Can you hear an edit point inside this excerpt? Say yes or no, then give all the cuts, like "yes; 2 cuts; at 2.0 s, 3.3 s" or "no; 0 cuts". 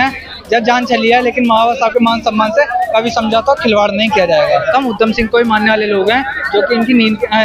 yes; 1 cut; at 4.7 s